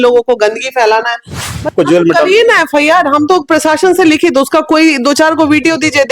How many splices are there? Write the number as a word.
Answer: one